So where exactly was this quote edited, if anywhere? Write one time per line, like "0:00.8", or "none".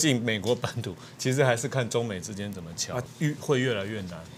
0:03.0